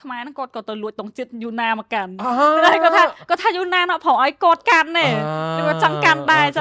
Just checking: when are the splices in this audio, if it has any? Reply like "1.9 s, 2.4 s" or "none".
none